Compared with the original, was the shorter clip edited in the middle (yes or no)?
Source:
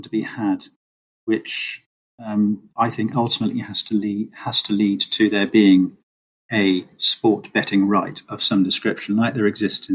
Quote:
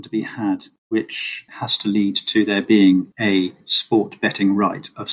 yes